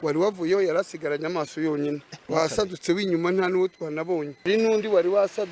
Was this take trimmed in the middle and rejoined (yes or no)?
yes